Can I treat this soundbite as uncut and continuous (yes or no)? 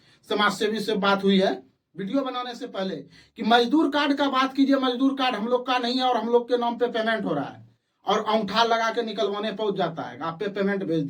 yes